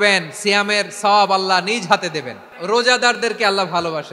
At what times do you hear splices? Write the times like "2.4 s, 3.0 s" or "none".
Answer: 2.5 s